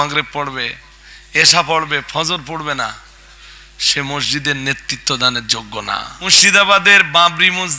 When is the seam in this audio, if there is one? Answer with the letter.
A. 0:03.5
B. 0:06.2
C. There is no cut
B